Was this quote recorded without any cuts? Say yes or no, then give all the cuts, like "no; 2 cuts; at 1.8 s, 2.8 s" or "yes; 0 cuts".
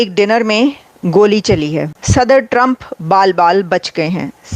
no; 1 cut; at 2.0 s